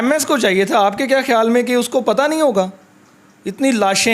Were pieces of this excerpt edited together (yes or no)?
no